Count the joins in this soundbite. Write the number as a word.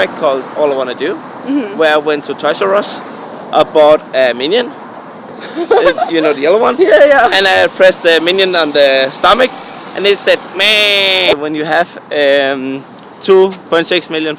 one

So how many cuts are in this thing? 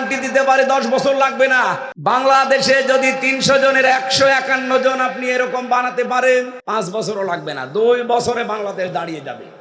two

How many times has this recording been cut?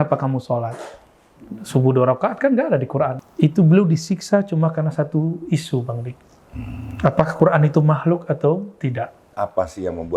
two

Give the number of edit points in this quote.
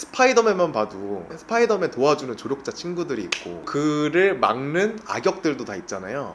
zero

